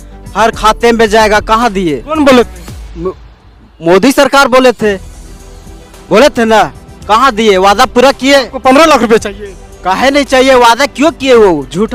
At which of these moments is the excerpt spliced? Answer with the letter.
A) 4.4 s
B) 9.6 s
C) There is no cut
C